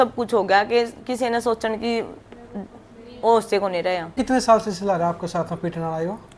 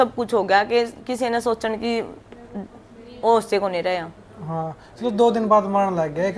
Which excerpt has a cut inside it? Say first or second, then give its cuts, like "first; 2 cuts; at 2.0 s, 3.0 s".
first; 1 cut; at 4.1 s